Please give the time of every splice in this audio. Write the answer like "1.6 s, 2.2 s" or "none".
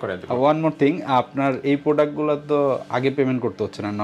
none